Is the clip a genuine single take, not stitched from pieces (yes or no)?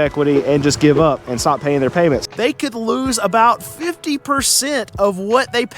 no